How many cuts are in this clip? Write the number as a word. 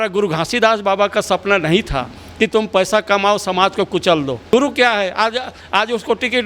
one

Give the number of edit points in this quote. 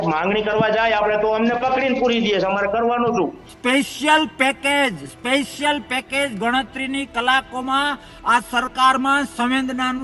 one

